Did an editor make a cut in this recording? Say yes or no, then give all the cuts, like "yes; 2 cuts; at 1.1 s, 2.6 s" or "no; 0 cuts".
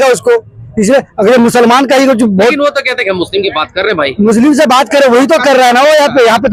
no; 0 cuts